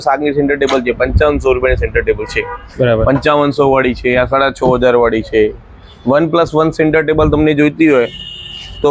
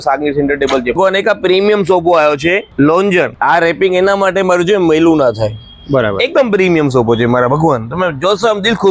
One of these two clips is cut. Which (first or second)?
second